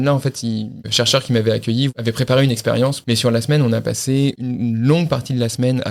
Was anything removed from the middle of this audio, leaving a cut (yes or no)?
yes